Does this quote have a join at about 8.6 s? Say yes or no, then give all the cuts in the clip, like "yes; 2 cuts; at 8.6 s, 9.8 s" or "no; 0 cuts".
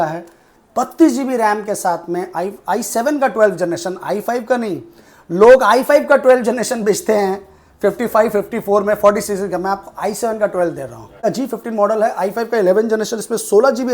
no; 1 cut; at 11.2 s